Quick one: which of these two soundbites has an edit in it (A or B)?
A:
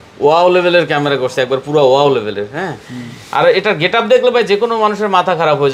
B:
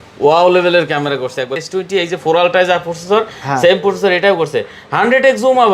B